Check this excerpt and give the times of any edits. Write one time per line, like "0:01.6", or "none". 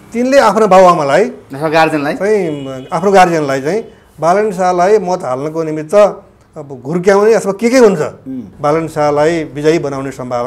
0:08.5